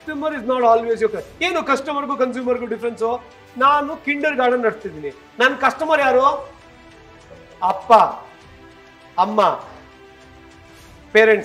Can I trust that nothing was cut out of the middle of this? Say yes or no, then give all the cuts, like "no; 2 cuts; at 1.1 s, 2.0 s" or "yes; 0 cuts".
yes; 0 cuts